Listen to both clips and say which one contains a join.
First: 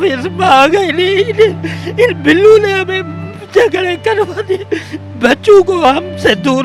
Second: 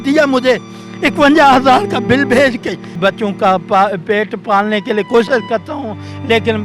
second; 1 cut; at 2.9 s

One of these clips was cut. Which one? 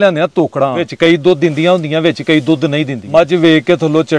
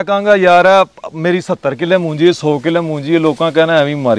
first; 2 cuts; at 0.9 s, 3.0 s

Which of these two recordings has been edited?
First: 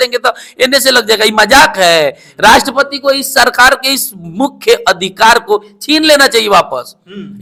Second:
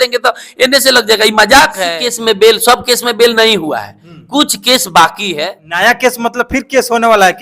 second; 2 cuts; at 1.8 s, 5.4 s

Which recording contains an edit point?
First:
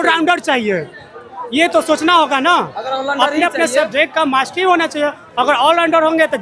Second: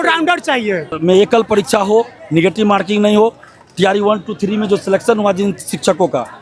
second; 1 cut; at 1.0 s

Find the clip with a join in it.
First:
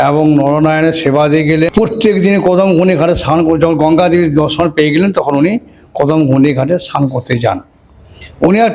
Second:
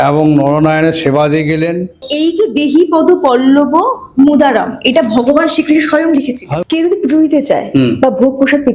second; 2 cuts; at 1.7 s, 6.5 s

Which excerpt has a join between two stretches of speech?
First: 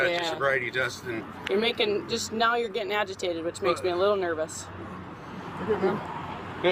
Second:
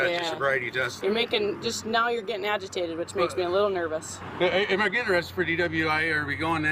second; 2 cuts; at 0.9 s, 4.2 s

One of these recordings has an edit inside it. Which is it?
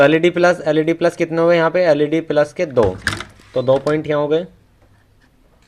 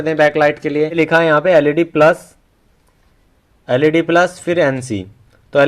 second; 1 cut; at 1.0 s

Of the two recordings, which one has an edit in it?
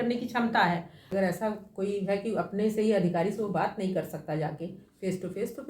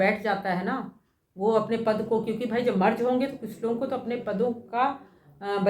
first; 1 cut; at 1.0 s

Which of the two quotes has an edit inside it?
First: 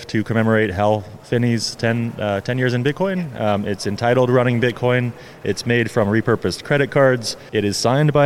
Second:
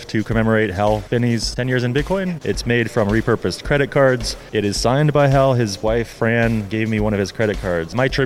second; 3 cuts; at 1.2 s, 2.4 s, 6.1 s

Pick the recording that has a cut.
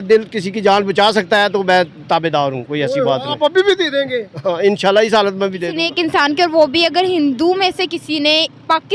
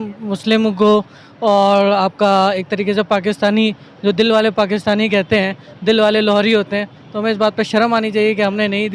first; 1 cut; at 5.7 s

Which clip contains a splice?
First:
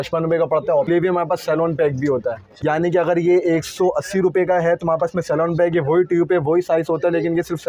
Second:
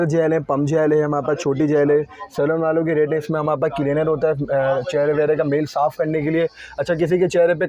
first; 2 cuts; at 0.9 s, 2.5 s

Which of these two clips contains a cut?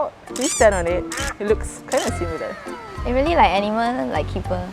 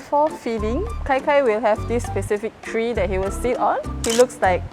second; 1 cut; at 0.9 s

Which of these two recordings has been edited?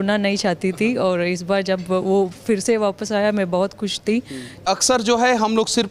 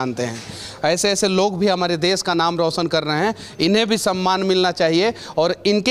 first; 1 cut; at 4.7 s

